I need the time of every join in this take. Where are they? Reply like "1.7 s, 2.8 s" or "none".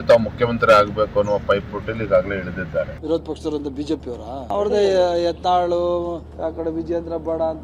none